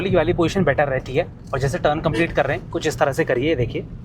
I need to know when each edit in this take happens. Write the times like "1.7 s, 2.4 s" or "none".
none